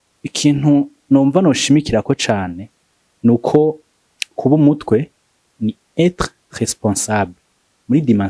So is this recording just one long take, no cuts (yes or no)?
yes